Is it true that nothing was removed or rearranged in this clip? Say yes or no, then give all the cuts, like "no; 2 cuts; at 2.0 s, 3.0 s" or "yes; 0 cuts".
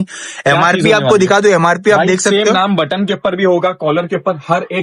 yes; 0 cuts